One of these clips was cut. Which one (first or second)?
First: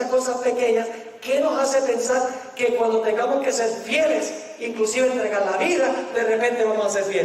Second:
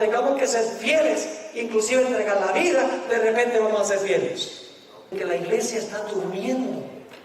second